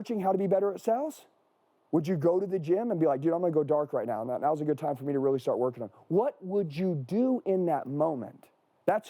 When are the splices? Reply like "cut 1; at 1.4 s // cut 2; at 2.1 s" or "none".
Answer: cut 1; at 1.7 s